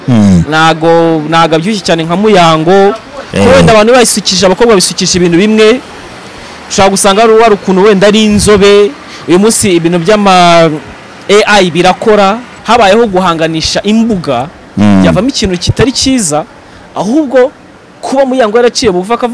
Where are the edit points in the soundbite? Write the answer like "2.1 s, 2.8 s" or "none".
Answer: 12.5 s